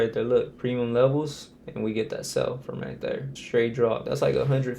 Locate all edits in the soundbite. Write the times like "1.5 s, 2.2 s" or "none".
3.3 s, 4.0 s